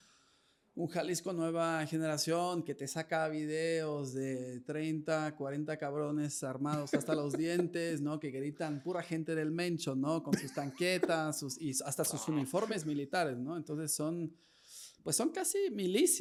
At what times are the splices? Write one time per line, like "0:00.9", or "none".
none